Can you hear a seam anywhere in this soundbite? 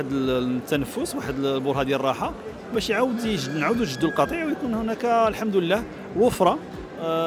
no; 0 cuts

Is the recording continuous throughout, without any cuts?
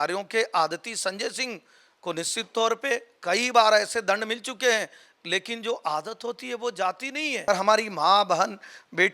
no; 1 cut; at 7.5 s

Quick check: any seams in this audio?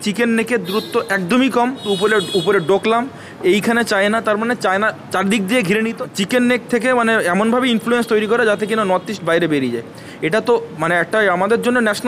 yes; 2 cuts; at 1.8 s, 6.0 s

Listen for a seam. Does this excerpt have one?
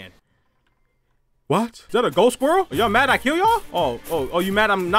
yes; 3 cuts; at 1.8 s, 2.7 s, 3.7 s

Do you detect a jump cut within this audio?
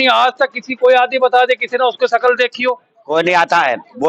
yes; 1 cut; at 2.9 s

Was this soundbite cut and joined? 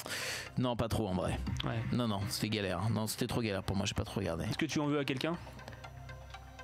yes; 1 cut; at 4.5 s

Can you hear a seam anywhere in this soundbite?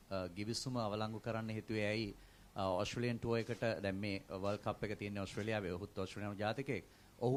no; 0 cuts

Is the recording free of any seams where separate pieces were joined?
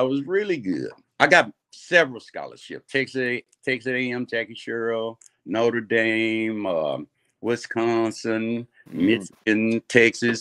no; 1 cut; at 1.0 s

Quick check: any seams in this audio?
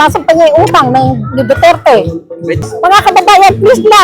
yes; 1 cut; at 2.6 s

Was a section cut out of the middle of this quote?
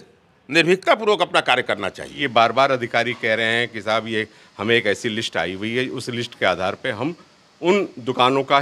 yes; 1 cut; at 2.2 s

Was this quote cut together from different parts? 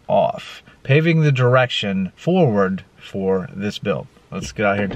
yes; 1 cut; at 2.1 s

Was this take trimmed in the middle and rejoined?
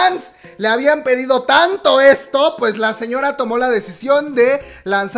no; 0 cuts

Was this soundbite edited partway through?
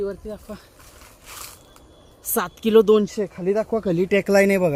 no; 0 cuts

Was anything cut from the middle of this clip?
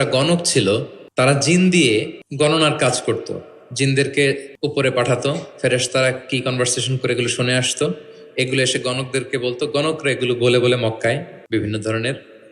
yes; 4 cuts; at 1.0 s, 2.2 s, 4.5 s, 11.3 s

